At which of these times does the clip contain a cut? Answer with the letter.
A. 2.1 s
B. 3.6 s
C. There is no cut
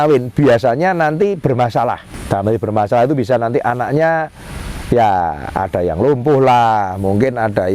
A